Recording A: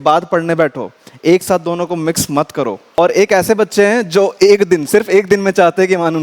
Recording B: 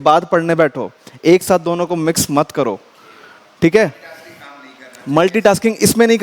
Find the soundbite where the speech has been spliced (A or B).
A